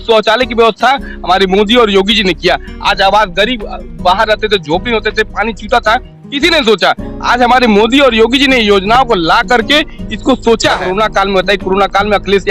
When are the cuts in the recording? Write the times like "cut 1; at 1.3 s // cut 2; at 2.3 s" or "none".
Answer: cut 1; at 10.8 s